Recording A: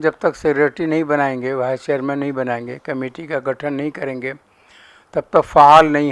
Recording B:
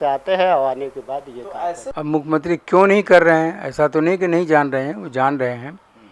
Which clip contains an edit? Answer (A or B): B